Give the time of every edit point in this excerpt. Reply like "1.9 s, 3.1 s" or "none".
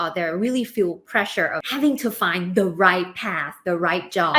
1.6 s

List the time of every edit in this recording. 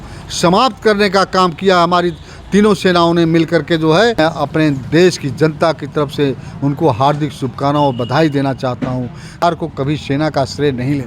4.2 s, 9.4 s

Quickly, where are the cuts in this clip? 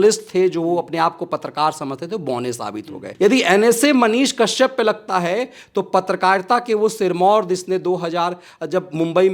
3.0 s

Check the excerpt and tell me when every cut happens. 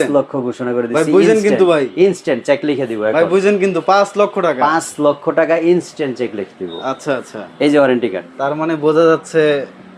none

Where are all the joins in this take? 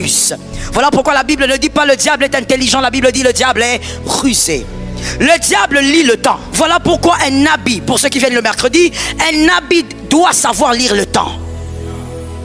6.5 s

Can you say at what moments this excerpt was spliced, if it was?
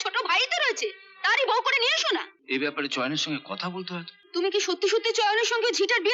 2.4 s, 4.2 s

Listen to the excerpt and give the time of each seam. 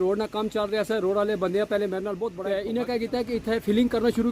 2.7 s

